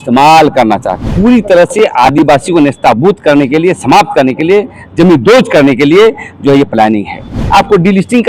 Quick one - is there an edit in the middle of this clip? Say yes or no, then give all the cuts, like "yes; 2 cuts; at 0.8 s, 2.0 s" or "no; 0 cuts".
yes; 2 cuts; at 1.1 s, 7.3 s